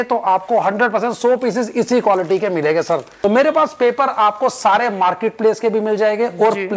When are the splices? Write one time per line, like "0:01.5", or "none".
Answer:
0:03.1